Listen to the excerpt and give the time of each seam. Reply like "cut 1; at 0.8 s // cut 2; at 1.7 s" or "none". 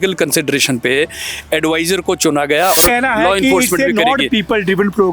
cut 1; at 2.8 s